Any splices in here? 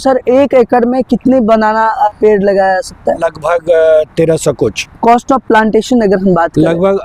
yes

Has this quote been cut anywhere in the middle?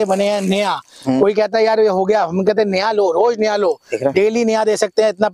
no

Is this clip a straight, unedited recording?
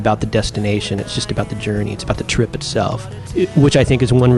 yes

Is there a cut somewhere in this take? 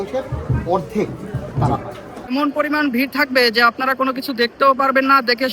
yes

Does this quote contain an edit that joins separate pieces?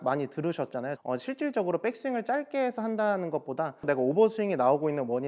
yes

